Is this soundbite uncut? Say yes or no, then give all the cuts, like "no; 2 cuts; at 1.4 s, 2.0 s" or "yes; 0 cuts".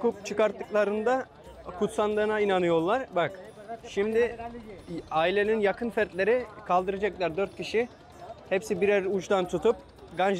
yes; 0 cuts